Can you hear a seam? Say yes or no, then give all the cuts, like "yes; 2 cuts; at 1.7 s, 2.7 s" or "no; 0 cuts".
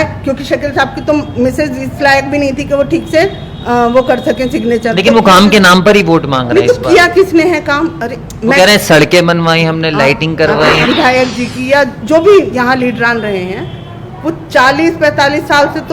yes; 1 cut; at 10.8 s